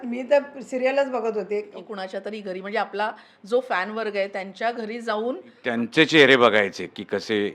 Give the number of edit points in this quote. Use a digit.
2